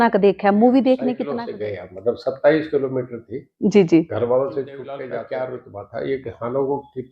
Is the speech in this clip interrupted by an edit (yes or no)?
yes